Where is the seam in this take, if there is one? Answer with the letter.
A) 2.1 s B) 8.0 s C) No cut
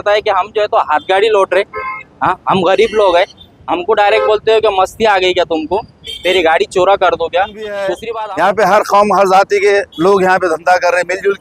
B